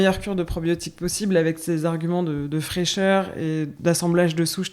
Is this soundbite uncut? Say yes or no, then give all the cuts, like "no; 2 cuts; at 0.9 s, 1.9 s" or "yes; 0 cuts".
no; 1 cut; at 3.7 s